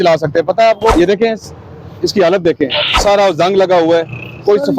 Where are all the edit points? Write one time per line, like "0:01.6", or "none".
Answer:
0:00.9
0:02.9